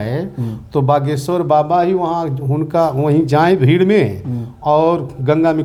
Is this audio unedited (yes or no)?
yes